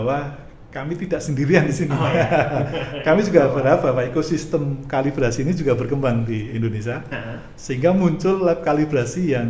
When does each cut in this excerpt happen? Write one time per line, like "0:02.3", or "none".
none